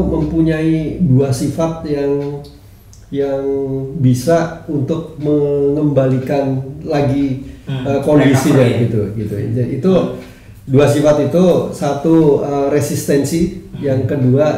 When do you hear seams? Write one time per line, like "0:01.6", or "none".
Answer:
none